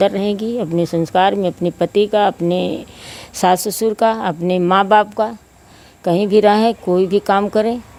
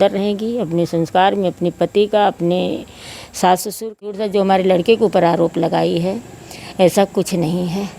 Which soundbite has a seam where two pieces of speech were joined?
second; 1 cut; at 4.2 s

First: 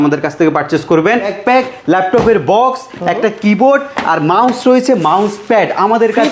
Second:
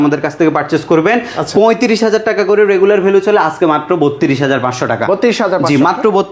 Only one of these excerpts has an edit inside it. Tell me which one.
first; 1 cut; at 1.3 s

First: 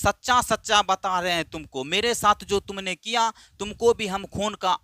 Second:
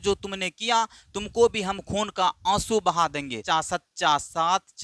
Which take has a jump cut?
second; 1 cut; at 3.4 s

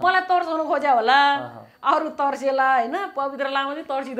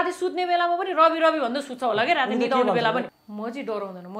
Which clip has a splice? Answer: second; 1 cut; at 3.1 s

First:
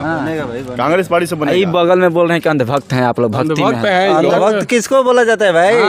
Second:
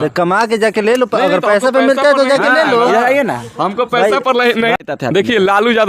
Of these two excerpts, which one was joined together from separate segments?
second; 1 cut; at 4.7 s

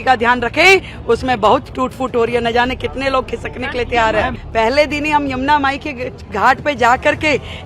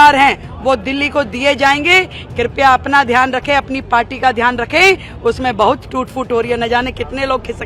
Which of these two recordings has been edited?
first; 1 cut; at 4.4 s

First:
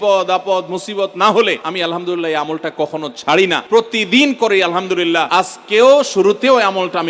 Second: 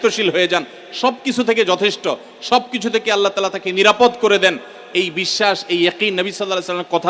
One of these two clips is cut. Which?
first; 3 cuts; at 1.7 s, 3.6 s, 5.3 s

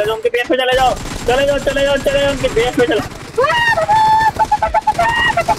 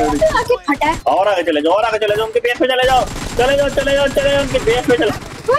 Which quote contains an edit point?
second; 1 cut; at 1.0 s

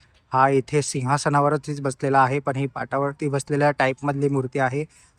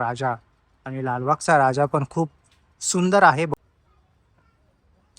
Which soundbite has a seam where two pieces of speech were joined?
second; 1 cut; at 3.5 s

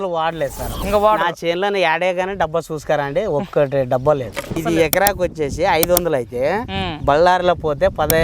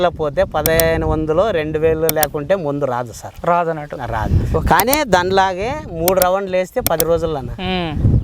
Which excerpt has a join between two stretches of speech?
first; 1 cut; at 4.5 s

